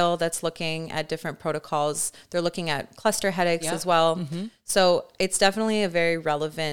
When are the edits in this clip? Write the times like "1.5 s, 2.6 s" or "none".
none